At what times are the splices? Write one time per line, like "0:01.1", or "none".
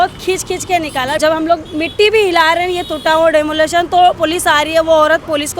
0:01.2